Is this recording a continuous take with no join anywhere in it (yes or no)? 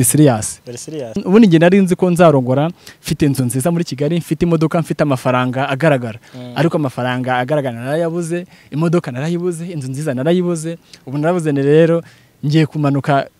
no